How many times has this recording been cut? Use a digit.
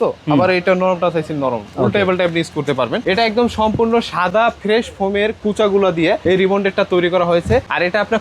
1